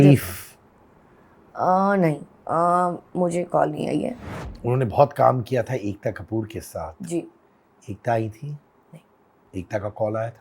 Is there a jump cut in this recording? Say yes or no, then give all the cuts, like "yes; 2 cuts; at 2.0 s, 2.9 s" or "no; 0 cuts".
yes; 1 cut; at 4.2 s